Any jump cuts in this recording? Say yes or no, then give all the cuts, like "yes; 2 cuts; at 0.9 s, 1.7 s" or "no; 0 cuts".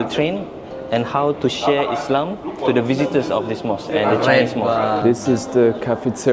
no; 0 cuts